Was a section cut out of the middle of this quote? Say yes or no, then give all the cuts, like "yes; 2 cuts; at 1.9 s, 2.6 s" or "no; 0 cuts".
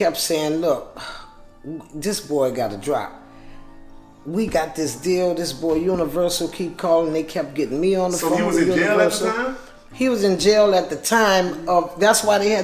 no; 0 cuts